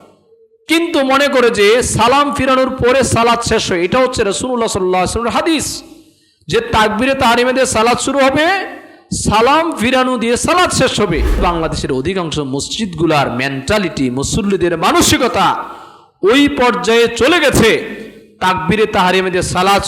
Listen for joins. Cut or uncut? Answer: cut